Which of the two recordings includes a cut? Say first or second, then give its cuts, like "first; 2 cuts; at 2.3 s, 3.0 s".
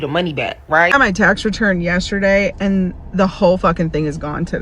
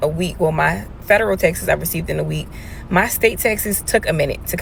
first; 1 cut; at 0.9 s